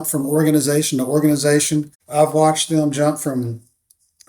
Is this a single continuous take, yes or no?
no